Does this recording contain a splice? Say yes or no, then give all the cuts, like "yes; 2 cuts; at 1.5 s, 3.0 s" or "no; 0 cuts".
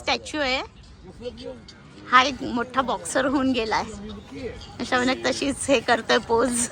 no; 0 cuts